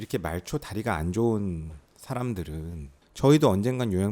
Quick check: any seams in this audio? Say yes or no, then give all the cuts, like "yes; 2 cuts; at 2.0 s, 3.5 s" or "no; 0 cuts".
yes; 1 cut; at 3.0 s